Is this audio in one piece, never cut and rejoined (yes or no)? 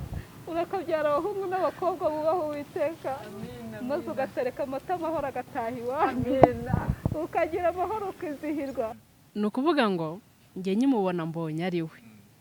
no